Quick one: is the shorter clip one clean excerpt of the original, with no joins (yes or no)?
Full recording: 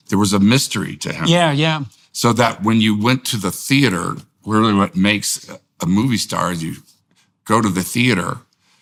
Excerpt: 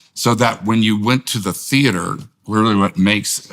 yes